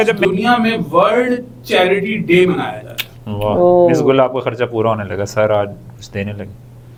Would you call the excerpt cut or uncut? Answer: uncut